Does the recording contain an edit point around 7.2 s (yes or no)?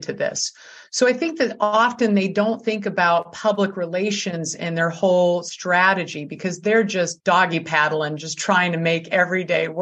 yes